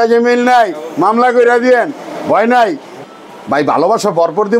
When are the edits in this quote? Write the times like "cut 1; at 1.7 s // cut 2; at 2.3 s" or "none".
cut 1; at 3.0 s